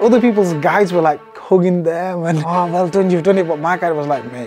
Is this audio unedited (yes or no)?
no